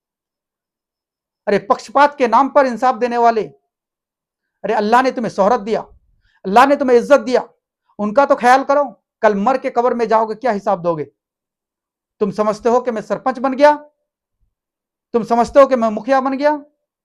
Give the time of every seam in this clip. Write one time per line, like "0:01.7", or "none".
none